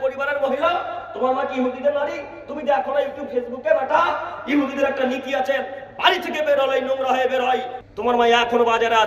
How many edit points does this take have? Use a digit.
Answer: 1